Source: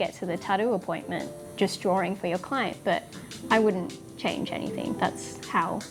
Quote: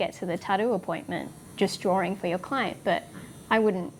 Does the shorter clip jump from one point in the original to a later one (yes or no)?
no